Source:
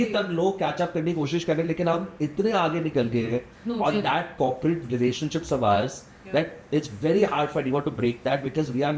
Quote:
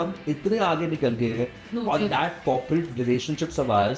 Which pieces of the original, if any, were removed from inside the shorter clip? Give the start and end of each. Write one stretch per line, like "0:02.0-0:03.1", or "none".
none